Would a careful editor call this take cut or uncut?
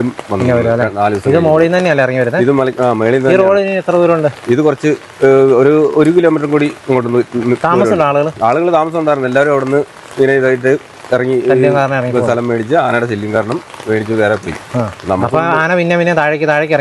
uncut